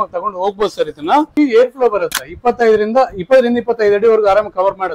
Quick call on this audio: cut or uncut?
cut